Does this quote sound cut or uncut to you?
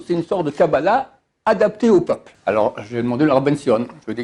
cut